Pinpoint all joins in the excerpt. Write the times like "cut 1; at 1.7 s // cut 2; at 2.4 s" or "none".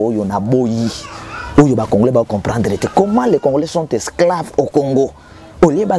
none